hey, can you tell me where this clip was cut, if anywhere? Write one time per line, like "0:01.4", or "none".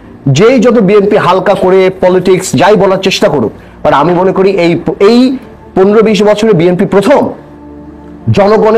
none